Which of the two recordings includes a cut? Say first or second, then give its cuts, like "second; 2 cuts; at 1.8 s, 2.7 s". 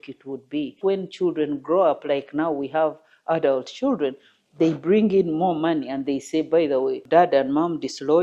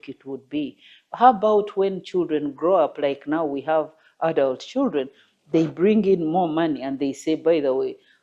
first; 2 cuts; at 0.8 s, 7.0 s